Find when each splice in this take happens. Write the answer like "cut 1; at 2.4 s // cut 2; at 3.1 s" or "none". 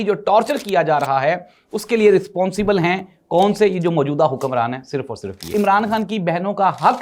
cut 1; at 5.5 s